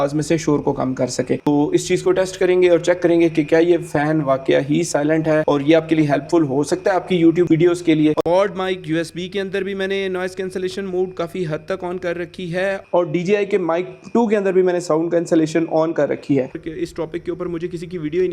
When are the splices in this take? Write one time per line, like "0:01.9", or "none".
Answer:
0:01.5
0:08.2
0:16.5